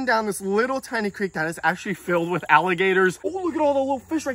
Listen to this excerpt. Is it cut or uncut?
cut